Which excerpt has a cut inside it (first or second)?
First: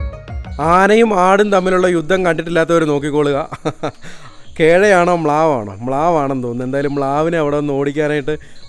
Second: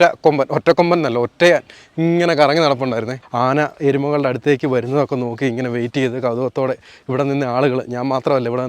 second